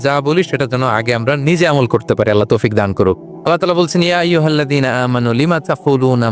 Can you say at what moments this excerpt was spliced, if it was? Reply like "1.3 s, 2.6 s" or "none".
3.3 s